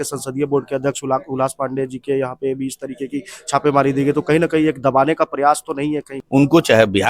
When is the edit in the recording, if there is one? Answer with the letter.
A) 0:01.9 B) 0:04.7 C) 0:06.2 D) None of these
C